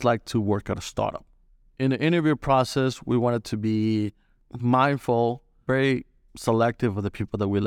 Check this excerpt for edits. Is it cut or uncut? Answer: cut